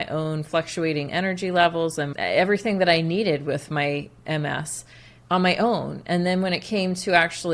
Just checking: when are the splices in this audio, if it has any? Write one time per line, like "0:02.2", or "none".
none